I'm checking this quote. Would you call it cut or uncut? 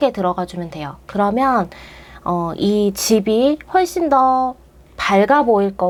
uncut